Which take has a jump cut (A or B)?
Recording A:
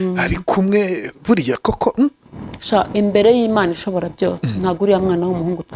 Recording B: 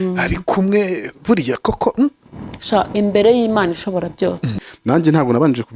B